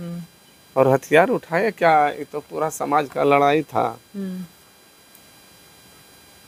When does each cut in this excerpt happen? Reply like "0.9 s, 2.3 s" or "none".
none